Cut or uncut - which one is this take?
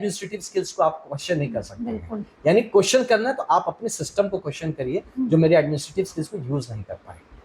uncut